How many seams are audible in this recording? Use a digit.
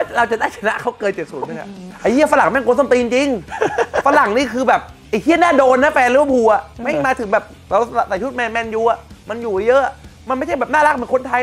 1